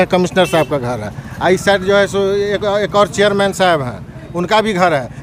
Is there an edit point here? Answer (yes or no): no